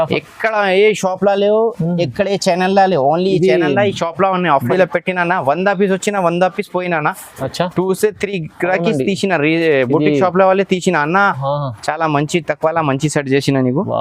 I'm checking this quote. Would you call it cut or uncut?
cut